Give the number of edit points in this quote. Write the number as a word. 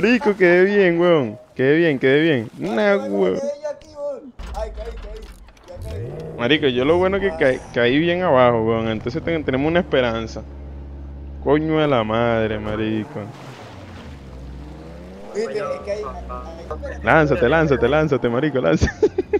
one